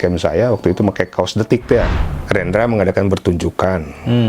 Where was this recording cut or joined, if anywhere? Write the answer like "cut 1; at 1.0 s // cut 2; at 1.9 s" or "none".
cut 1; at 2.0 s